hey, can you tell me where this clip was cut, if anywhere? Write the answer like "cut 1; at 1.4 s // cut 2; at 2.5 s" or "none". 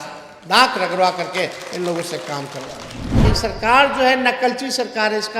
cut 1; at 3.2 s